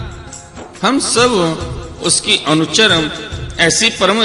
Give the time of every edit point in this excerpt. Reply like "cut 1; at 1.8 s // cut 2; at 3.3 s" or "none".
none

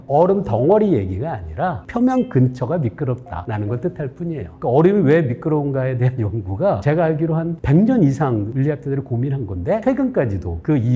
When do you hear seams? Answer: cut 1; at 1.8 s // cut 2; at 3.4 s // cut 3; at 4.5 s // cut 4; at 6.8 s // cut 5; at 8.5 s // cut 6; at 9.8 s

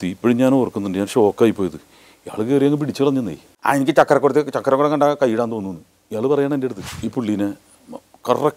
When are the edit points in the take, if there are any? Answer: cut 1; at 3.5 s // cut 2; at 6.9 s

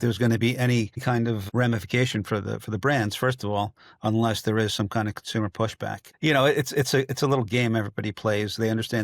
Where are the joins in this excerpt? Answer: cut 1; at 1.2 s // cut 2; at 6.0 s

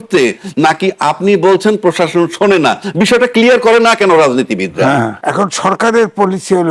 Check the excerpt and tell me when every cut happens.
cut 1; at 5.2 s

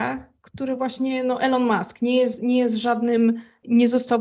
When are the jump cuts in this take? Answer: none

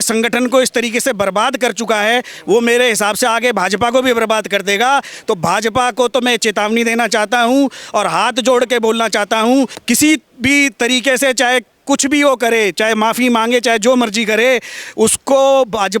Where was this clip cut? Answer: cut 1; at 9.8 s

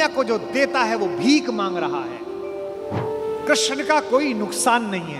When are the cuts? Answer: cut 1; at 3.0 s

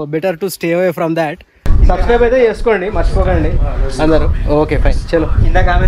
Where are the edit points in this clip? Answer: cut 1; at 1.7 s

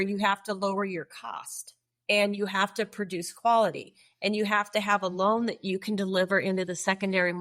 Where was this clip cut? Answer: none

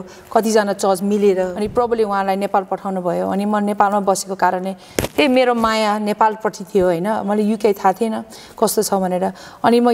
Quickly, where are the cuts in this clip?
cut 1; at 1.6 s

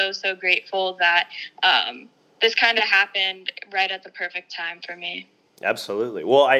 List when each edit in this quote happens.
none

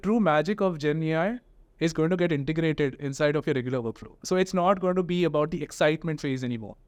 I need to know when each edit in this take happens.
none

